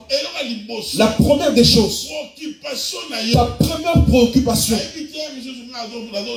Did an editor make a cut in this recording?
no; 0 cuts

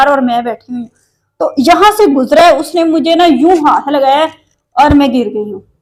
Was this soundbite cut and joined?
no; 0 cuts

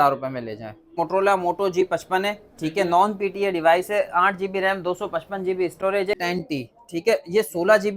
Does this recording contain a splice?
yes; 2 cuts; at 0.9 s, 6.1 s

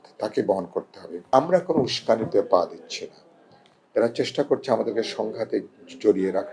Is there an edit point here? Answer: yes; 1 cut; at 1.3 s

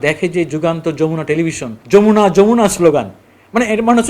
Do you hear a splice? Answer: yes; 1 cut; at 1.7 s

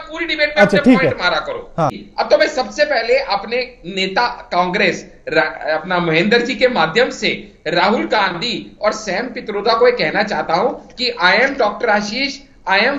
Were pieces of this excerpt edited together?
yes; 1 cut; at 2.0 s

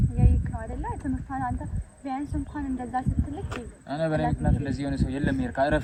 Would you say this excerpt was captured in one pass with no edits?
yes; 0 cuts

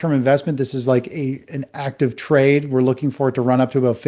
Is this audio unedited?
yes; 0 cuts

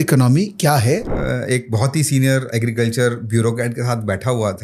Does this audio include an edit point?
yes; 1 cut; at 1.1 s

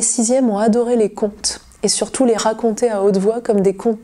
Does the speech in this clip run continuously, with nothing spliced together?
yes; 0 cuts

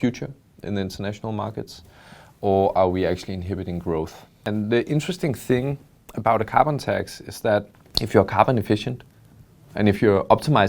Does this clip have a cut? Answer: yes; 2 cuts; at 4.4 s, 7.7 s

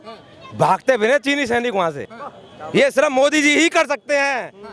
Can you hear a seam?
yes; 1 cut; at 2.0 s

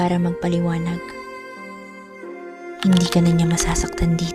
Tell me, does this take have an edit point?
yes; 2 cuts; at 1.1 s, 2.8 s

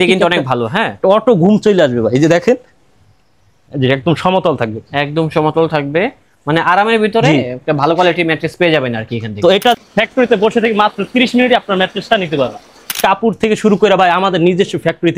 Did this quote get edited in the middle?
yes; 2 cuts; at 9.8 s, 12.9 s

